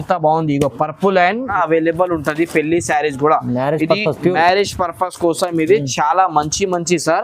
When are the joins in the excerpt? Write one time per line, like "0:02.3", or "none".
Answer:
0:01.5